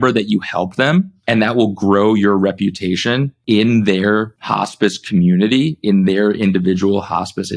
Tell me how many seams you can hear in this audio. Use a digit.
3